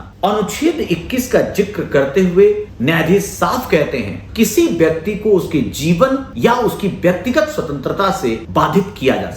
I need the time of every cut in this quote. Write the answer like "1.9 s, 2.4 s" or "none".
2.7 s, 4.2 s, 6.3 s, 8.4 s